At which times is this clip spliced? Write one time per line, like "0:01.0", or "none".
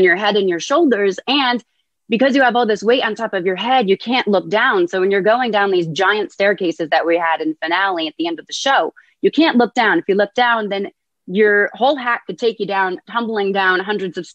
0:13.0